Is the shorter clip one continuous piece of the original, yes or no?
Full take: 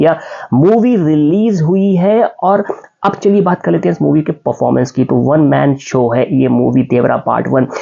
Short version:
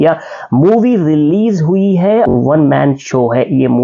no